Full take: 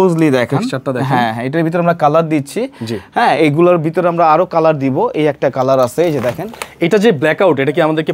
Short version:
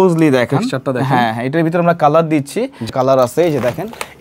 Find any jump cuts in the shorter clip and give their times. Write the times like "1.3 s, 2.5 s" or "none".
2.9 s